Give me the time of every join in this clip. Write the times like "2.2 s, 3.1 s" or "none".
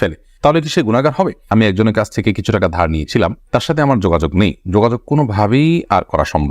1.5 s